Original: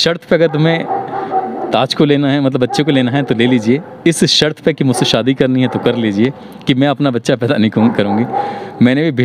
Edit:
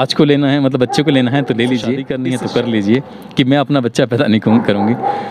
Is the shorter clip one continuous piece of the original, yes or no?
no